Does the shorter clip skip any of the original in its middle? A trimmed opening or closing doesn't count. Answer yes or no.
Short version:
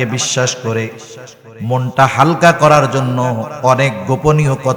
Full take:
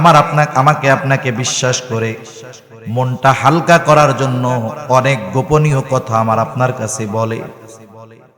no